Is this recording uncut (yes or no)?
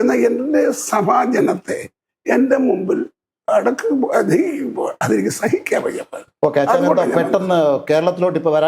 yes